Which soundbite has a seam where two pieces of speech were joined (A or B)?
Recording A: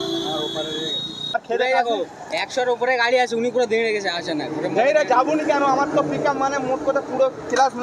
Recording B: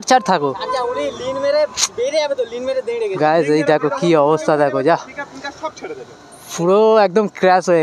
A